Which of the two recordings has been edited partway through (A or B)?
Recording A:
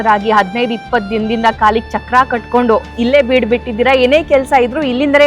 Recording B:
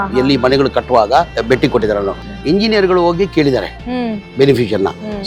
B